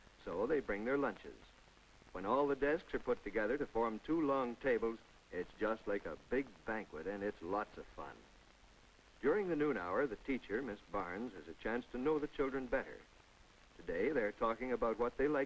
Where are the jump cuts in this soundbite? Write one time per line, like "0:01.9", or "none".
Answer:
0:03.7